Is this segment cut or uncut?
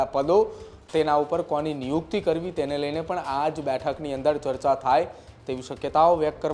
uncut